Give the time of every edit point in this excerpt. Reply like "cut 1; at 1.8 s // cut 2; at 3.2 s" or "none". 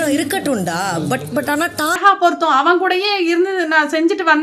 cut 1; at 2.0 s

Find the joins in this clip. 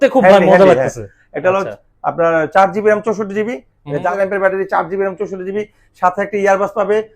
cut 1; at 4.1 s

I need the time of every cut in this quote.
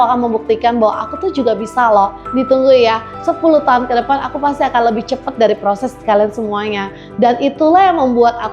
cut 1; at 2.2 s // cut 2; at 3.1 s

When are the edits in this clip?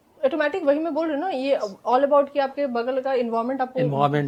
none

